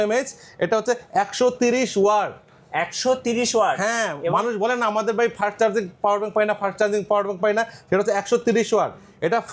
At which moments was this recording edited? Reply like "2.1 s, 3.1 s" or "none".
none

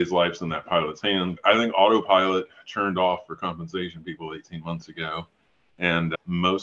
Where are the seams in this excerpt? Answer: 1.3 s

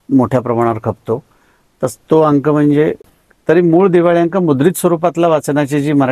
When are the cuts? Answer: 3.0 s

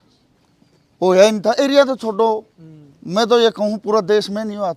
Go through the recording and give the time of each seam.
none

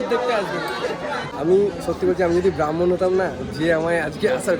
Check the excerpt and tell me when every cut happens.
1.3 s

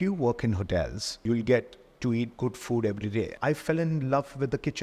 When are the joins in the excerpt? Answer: 1.2 s, 3.3 s

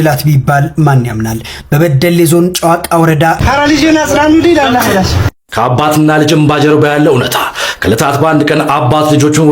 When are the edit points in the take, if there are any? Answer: 3.4 s

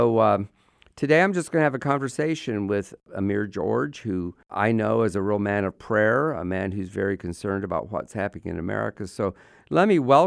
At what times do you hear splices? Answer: 3.1 s, 4.4 s

